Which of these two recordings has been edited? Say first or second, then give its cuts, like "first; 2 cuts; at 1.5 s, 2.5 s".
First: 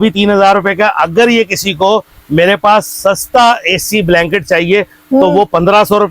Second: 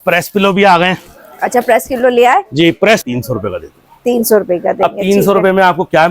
second; 1 cut; at 3.0 s